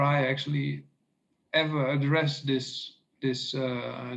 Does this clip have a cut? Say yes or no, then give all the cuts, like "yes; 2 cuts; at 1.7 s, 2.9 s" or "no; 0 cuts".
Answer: no; 0 cuts